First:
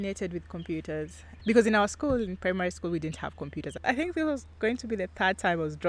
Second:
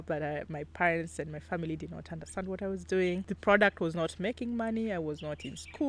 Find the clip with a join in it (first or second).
first